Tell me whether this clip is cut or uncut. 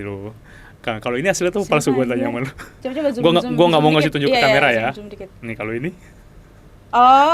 uncut